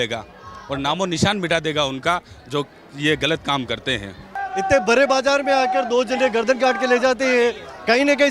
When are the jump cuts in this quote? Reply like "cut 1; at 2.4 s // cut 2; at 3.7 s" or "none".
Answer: cut 1; at 4.3 s